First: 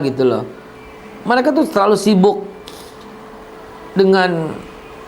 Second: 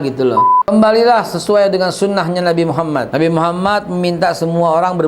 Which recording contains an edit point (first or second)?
second